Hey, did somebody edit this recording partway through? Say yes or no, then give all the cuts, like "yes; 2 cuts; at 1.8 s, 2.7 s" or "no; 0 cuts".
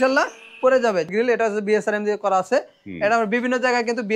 yes; 1 cut; at 1.1 s